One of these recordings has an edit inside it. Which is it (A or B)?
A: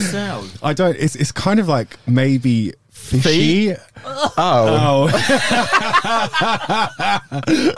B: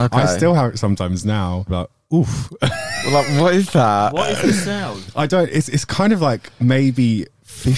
B